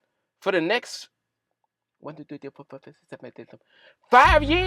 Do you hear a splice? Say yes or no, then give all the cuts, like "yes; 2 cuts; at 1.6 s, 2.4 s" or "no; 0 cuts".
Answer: no; 0 cuts